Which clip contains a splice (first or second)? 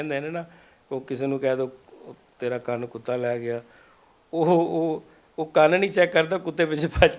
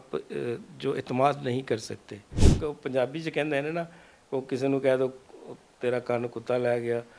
second